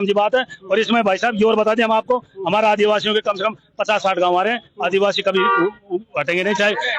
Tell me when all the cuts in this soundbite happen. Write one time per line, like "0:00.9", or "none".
none